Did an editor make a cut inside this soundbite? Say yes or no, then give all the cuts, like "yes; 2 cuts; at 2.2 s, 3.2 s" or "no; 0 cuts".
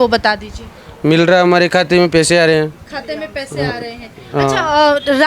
no; 0 cuts